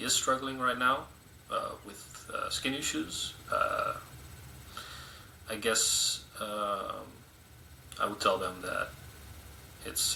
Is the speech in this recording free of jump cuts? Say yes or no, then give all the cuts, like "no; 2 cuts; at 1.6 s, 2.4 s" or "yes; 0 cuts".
yes; 0 cuts